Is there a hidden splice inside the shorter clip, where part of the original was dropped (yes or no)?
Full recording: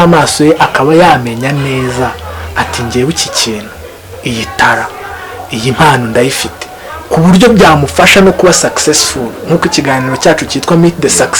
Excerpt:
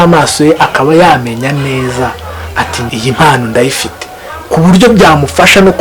yes